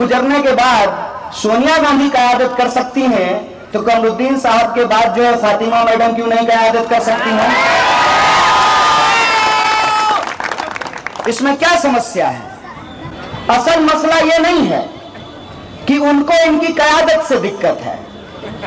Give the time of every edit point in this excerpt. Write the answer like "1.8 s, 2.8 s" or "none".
none

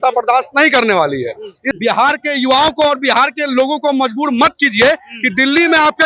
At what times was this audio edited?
1.7 s

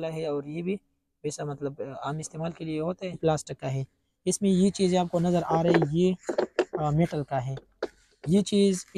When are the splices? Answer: 3.2 s

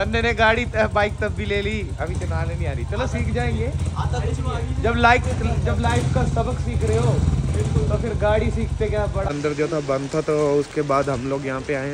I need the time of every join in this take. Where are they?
9.3 s

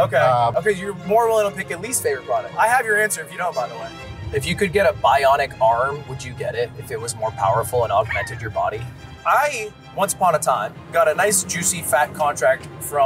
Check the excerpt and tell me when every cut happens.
2.5 s, 3.9 s, 9.1 s

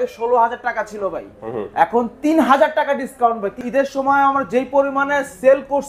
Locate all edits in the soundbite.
3.6 s

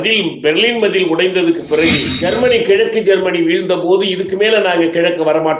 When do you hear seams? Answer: 2.1 s

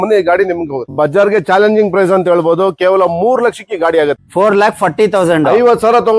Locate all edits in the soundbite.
0.9 s, 4.2 s

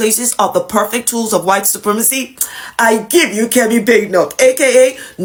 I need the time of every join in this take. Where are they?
none

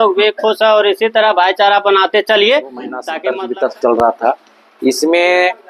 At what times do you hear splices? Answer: 3.1 s

